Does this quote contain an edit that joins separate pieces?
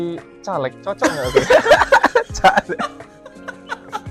no; 0 cuts

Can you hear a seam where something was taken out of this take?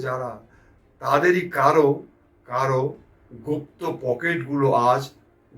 no; 0 cuts

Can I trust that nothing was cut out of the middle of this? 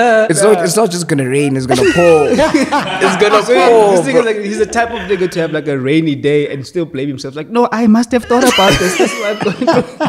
yes; 0 cuts

